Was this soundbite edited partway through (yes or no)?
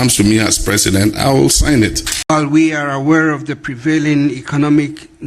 yes